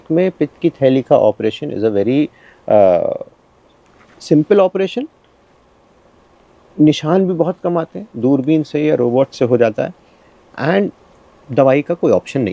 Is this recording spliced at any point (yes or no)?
no